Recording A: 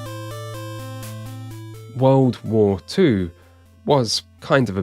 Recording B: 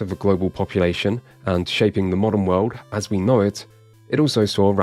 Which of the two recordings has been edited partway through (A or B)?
A